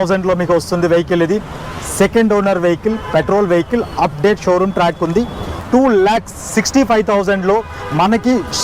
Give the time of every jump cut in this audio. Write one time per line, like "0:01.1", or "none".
0:05.5